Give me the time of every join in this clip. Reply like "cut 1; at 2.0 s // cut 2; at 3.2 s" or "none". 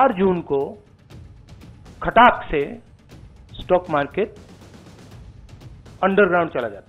cut 1; at 4.4 s // cut 2; at 6.0 s